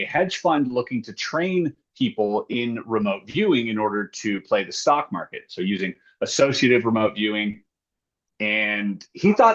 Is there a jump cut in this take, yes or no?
no